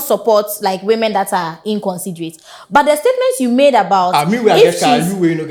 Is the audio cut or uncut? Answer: uncut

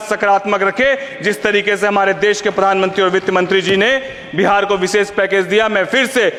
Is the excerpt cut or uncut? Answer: uncut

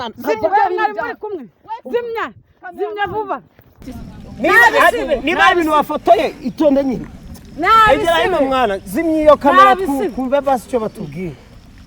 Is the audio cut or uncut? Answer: cut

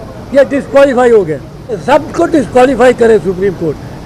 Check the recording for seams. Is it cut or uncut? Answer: cut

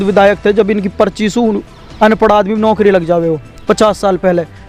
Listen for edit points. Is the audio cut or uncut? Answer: uncut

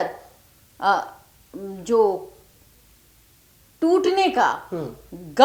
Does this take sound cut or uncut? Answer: uncut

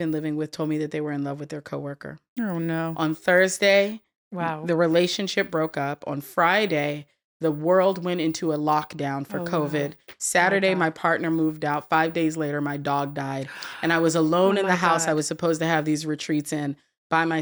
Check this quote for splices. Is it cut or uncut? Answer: uncut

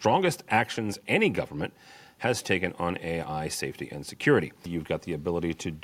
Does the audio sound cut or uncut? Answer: cut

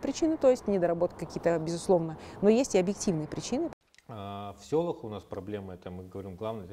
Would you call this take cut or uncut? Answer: cut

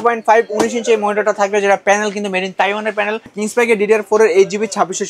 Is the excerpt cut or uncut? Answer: cut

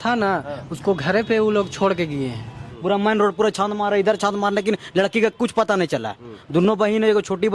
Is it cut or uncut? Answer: cut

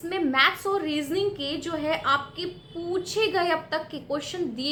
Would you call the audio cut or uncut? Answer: uncut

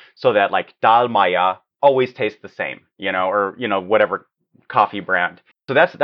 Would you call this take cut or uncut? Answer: uncut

